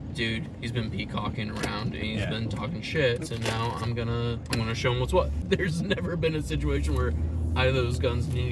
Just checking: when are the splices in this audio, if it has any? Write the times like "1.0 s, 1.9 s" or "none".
3.2 s, 4.4 s, 5.4 s